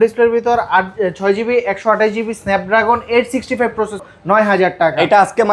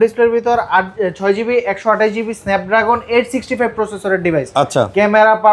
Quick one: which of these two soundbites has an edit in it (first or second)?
first